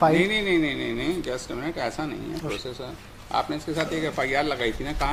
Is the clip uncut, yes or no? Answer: yes